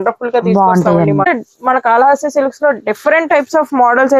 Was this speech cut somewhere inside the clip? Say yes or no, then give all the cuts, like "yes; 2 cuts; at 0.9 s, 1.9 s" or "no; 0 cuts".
yes; 1 cut; at 1.3 s